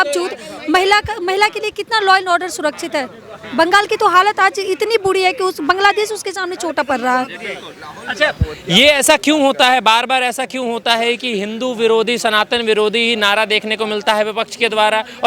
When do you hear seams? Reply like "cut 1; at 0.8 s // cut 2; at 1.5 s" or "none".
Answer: none

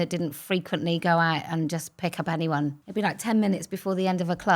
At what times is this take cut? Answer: cut 1; at 2.8 s

